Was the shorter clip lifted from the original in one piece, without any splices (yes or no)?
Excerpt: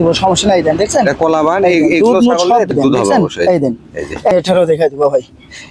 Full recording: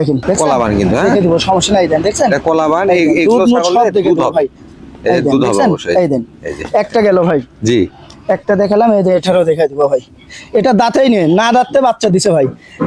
no